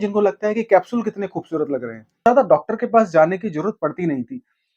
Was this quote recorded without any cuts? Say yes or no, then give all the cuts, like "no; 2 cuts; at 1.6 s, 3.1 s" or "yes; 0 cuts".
no; 1 cut; at 2.3 s